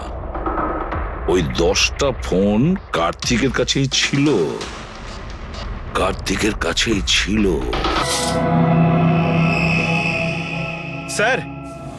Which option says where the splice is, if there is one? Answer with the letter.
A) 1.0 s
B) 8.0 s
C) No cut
B